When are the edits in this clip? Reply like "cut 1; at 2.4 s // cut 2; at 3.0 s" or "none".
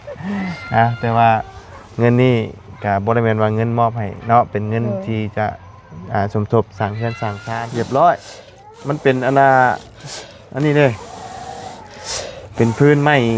cut 1; at 7.4 s